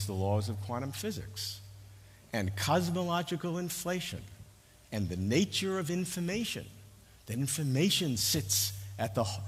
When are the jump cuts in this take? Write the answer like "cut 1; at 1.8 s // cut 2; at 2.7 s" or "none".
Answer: none